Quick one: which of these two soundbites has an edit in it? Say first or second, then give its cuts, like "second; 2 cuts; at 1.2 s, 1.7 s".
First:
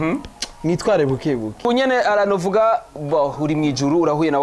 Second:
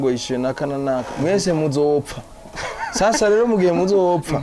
first; 1 cut; at 1.6 s